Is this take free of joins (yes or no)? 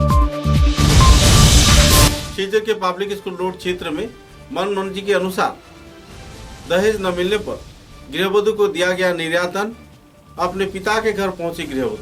yes